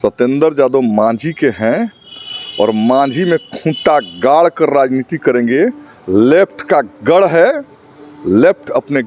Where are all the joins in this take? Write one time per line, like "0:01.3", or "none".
none